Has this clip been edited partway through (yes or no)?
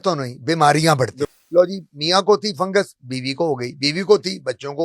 yes